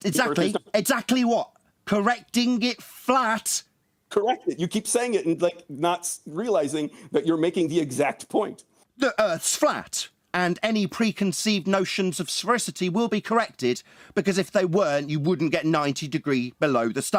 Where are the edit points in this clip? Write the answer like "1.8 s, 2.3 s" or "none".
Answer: none

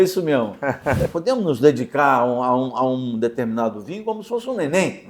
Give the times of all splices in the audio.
1.0 s

